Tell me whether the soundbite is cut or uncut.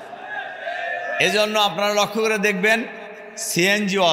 uncut